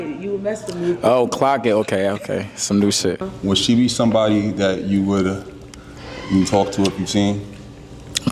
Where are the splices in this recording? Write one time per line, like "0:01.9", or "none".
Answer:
0:03.3